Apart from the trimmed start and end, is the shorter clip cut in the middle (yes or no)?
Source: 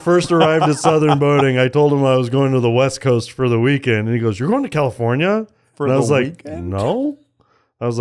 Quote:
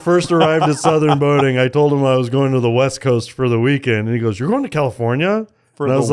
no